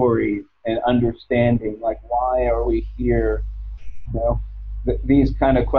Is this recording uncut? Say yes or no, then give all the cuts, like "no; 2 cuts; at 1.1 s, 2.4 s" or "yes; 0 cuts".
yes; 0 cuts